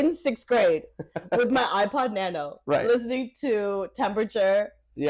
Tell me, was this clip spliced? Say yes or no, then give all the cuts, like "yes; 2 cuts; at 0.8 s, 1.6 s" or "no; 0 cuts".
no; 0 cuts